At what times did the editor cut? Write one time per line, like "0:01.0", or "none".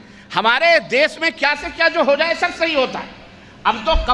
none